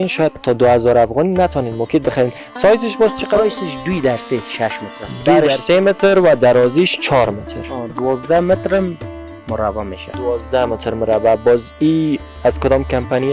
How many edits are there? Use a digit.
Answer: 1